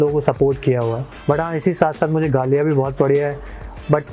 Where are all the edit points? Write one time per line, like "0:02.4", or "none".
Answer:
0:01.1

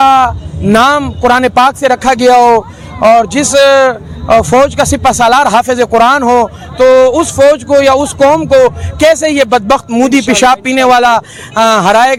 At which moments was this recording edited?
none

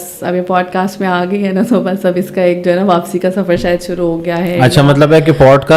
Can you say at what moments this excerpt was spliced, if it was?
none

